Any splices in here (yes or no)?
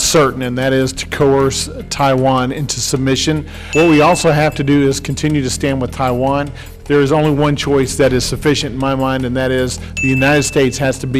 yes